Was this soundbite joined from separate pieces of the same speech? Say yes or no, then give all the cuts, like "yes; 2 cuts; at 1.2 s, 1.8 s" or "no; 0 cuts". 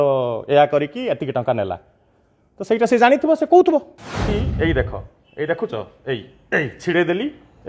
yes; 1 cut; at 4.4 s